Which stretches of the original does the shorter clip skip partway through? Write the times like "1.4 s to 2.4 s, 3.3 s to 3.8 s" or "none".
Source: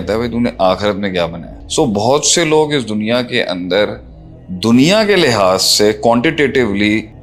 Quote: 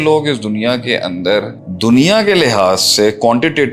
4.1 s to 4.4 s